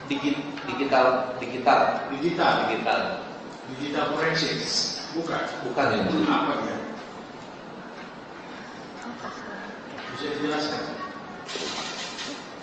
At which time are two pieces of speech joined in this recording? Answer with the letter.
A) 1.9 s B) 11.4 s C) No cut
C